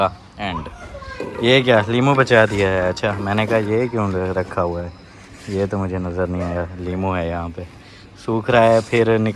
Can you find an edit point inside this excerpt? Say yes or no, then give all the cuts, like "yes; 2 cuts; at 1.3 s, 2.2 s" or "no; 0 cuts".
no; 0 cuts